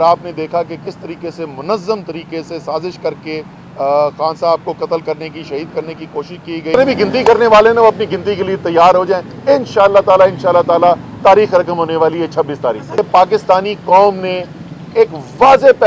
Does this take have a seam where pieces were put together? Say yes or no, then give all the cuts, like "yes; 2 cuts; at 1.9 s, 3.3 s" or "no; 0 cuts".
yes; 2 cuts; at 6.7 s, 13.0 s